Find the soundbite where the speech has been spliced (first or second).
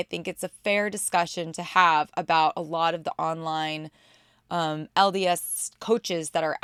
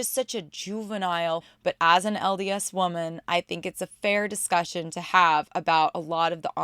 second